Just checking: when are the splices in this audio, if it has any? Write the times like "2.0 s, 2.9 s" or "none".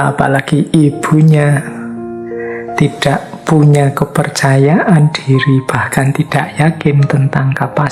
none